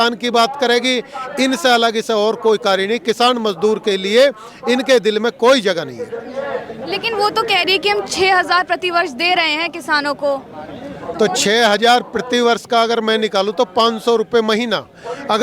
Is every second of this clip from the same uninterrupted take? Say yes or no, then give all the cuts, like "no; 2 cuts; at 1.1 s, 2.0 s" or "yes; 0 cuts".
yes; 0 cuts